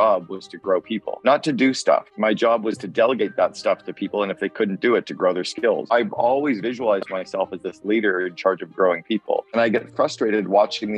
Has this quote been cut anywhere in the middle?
yes; 3 cuts; at 1.1 s, 2.1 s, 5.9 s

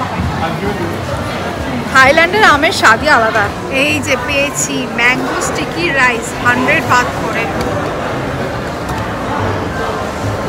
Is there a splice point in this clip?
yes; 1 cut; at 3.5 s

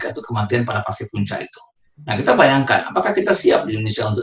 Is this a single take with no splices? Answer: yes; 0 cuts

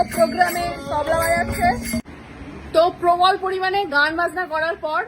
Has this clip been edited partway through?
yes; 1 cut; at 2.0 s

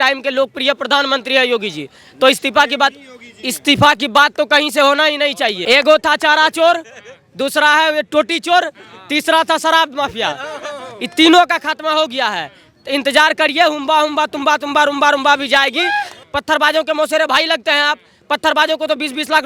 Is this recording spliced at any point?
yes; 2 cuts; at 5.6 s, 16.1 s

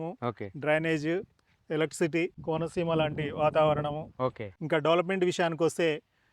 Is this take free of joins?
no; 2 cuts; at 2.4 s, 4.5 s

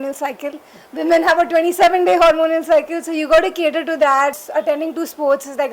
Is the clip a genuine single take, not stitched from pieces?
no; 1 cut; at 4.4 s

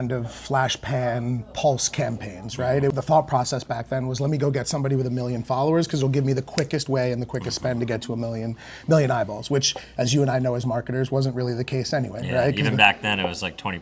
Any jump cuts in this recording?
yes; 1 cut; at 2.9 s

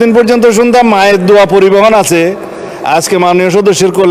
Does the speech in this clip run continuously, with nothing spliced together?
yes; 0 cuts

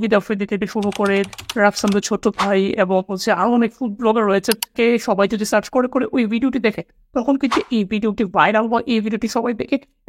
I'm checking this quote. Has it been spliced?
yes; 1 cut; at 4.7 s

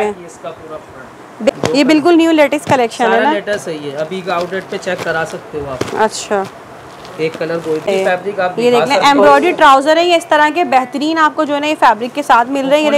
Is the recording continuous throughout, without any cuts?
no; 2 cuts; at 1.5 s, 7.9 s

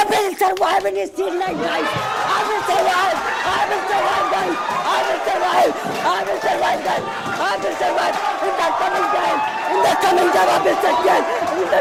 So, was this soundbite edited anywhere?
no; 0 cuts

